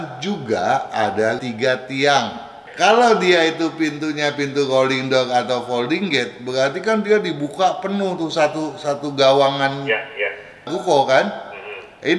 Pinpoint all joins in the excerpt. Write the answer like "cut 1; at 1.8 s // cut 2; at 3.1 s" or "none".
cut 1; at 1.4 s // cut 2; at 2.6 s